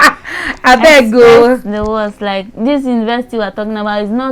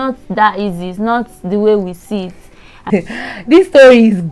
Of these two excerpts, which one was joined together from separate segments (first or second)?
second